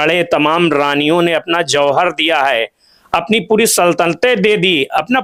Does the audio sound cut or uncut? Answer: uncut